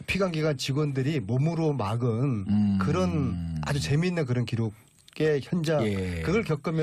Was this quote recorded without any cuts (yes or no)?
no